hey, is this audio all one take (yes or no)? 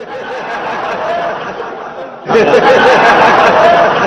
no